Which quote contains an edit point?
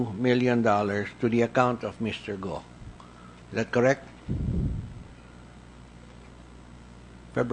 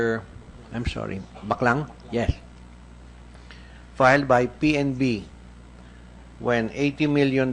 second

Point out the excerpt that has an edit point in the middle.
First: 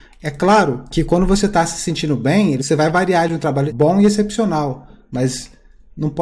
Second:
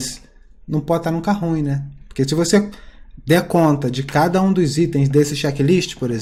first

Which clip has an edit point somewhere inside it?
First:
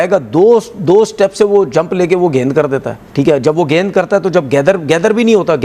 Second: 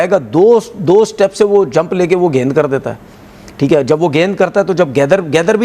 first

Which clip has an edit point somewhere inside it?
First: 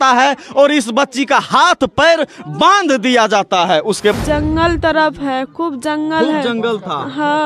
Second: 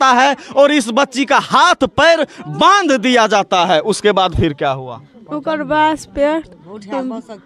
first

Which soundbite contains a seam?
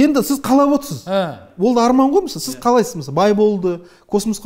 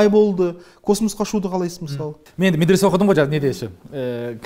second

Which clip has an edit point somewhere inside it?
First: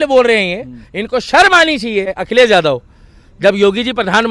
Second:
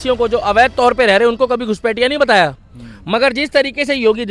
first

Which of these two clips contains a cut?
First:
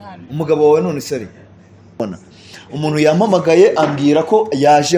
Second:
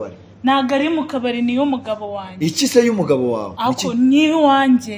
first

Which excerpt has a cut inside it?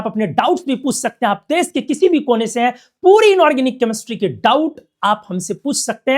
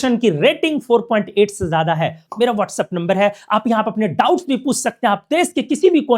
second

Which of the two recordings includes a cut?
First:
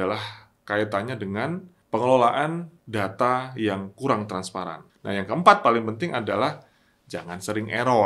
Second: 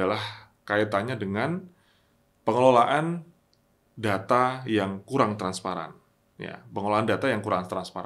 first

